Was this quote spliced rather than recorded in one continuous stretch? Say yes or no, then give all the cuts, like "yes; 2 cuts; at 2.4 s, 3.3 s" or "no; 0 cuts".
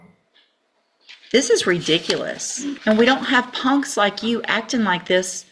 yes; 1 cut; at 2.7 s